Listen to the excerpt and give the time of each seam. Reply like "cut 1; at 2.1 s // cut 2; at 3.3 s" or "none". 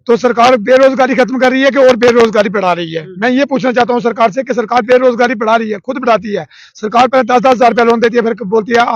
none